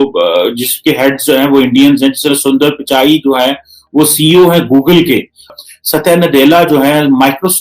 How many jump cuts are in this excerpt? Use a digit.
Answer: 1